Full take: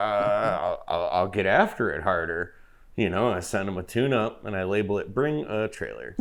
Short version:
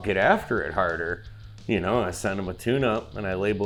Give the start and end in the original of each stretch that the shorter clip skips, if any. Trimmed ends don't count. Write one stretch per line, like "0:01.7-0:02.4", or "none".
none